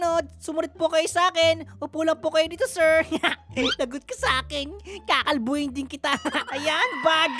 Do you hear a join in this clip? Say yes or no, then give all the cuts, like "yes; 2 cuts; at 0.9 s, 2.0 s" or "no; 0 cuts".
yes; 1 cut; at 6.5 s